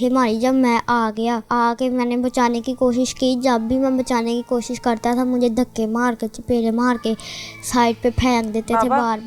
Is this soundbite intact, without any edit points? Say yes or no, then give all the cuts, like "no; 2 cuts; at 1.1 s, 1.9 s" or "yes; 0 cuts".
no; 1 cut; at 1.4 s